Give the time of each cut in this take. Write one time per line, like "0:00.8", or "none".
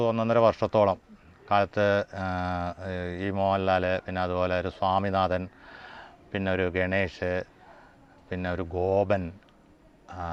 none